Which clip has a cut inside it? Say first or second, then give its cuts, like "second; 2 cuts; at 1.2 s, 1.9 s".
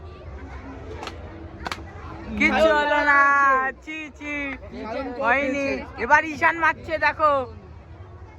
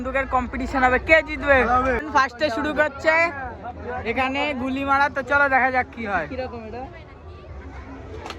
second; 1 cut; at 2.0 s